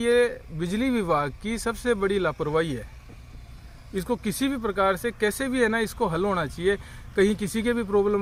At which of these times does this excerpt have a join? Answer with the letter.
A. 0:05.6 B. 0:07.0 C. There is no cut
C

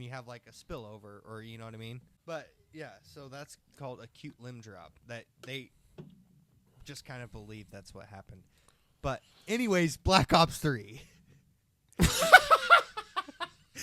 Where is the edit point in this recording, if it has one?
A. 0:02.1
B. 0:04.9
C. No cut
A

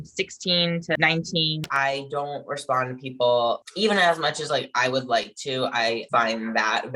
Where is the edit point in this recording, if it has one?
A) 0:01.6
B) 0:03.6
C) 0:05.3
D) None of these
A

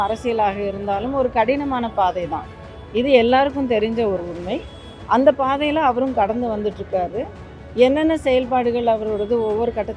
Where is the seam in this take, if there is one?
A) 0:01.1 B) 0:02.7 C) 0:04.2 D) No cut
D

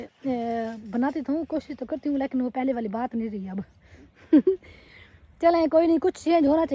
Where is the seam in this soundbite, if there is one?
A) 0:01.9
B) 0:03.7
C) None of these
C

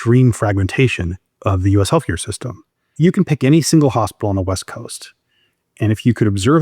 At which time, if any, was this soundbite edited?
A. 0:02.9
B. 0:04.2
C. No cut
A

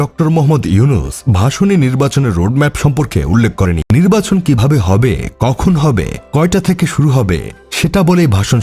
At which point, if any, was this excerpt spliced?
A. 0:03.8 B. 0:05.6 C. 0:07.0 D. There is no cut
A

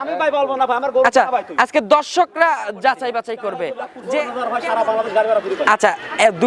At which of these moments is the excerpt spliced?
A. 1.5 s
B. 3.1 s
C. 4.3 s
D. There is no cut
C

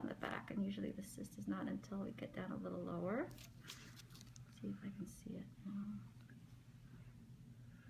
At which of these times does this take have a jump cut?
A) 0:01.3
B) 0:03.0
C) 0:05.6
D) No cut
B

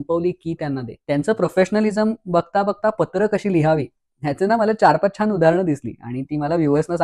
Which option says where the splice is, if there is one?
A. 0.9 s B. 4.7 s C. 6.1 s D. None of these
A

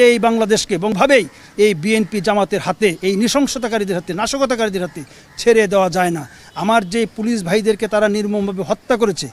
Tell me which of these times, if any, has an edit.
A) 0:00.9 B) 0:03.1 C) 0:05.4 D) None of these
A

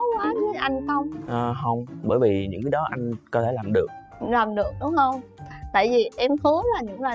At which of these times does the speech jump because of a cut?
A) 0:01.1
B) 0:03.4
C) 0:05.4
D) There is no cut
D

